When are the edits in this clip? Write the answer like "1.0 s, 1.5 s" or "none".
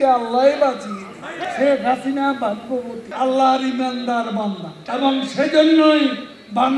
1.4 s, 3.1 s, 4.7 s